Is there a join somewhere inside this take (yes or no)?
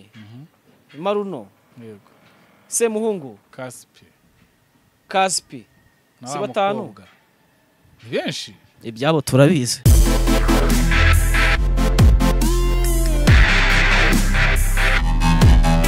yes